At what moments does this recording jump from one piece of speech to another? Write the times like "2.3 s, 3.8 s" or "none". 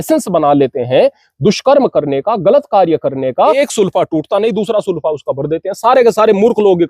3.6 s